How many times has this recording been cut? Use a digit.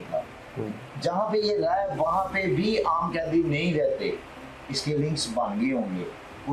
0